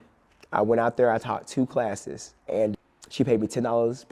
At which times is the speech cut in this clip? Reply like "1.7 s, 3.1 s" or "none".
2.7 s